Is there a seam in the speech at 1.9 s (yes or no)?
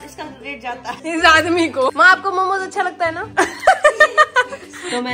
yes